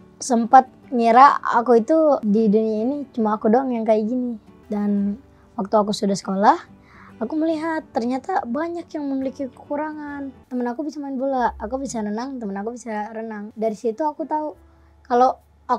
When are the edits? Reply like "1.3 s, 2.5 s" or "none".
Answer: 2.2 s, 4.5 s, 10.4 s, 13.5 s